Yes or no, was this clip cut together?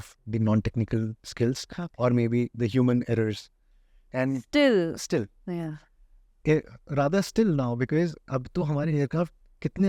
no